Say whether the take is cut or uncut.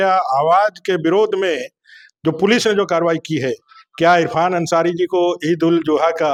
uncut